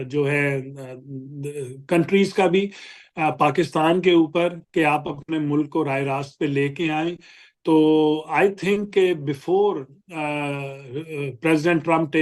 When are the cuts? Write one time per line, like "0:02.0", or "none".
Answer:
none